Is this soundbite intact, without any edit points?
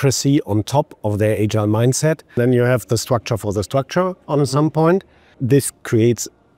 no; 2 cuts; at 2.4 s, 5.3 s

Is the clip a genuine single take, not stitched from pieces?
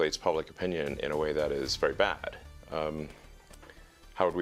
yes; 0 cuts

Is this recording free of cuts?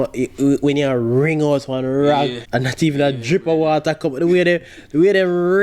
no; 1 cut; at 2.4 s

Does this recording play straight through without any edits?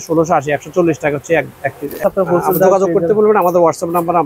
no; 1 cut; at 2.1 s

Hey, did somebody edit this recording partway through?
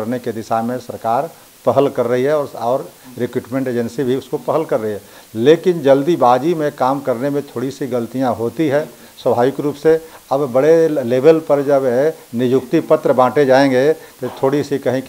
no; 0 cuts

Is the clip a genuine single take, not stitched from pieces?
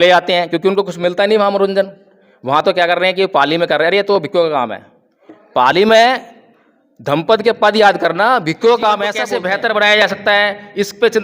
no; 1 cut; at 9.2 s

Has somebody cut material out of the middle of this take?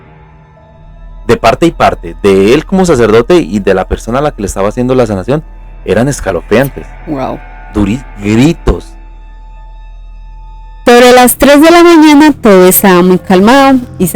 yes; 1 cut; at 10.7 s

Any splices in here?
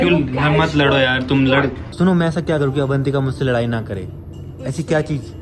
yes; 1 cut; at 1.8 s

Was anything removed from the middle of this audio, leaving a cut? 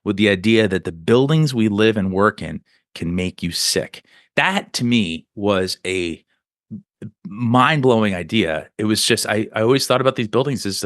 no; 0 cuts

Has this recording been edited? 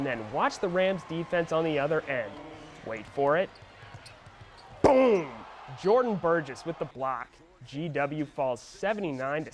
no; 0 cuts

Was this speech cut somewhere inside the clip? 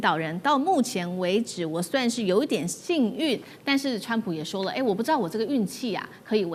no; 0 cuts

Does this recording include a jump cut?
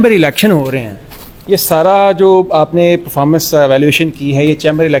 no; 0 cuts

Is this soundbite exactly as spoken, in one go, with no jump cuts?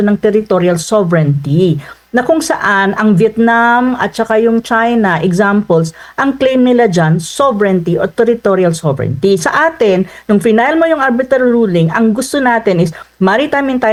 yes; 0 cuts

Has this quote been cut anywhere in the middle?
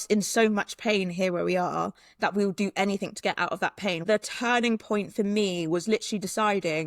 yes; 1 cut; at 4.0 s

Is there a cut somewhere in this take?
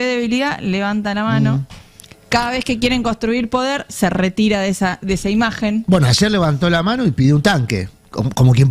no; 0 cuts

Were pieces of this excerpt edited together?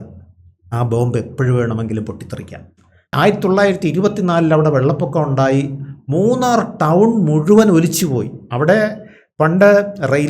yes; 1 cut; at 3.1 s

